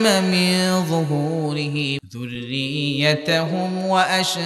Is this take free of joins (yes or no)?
no